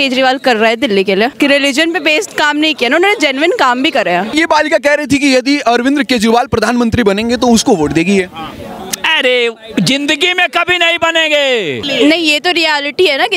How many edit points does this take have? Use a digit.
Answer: 3